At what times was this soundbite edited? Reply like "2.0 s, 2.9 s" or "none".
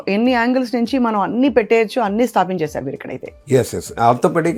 none